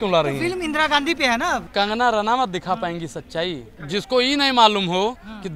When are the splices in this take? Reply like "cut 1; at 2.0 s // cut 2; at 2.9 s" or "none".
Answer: cut 1; at 1.7 s // cut 2; at 3.7 s